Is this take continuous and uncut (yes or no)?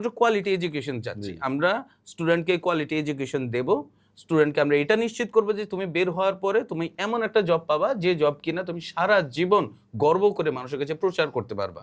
yes